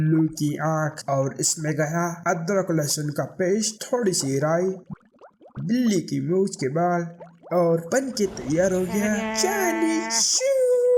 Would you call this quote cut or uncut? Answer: uncut